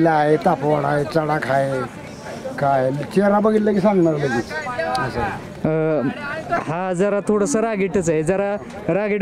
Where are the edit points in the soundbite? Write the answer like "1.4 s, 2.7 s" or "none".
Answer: none